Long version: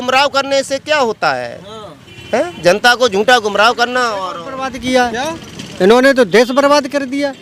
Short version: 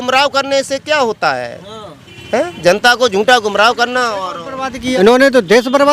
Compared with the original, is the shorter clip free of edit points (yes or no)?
no